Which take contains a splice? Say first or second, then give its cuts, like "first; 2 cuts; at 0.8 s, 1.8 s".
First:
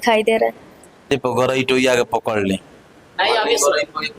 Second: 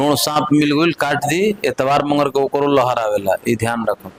first; 1 cut; at 1.1 s